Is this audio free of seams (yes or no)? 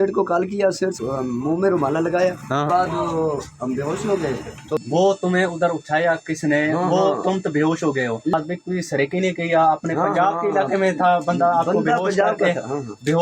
no